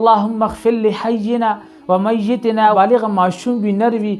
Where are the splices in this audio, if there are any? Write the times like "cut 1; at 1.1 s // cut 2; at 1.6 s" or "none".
cut 1; at 2.7 s